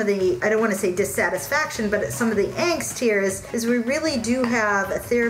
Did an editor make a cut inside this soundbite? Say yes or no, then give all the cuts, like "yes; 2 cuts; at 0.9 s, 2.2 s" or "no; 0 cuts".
no; 0 cuts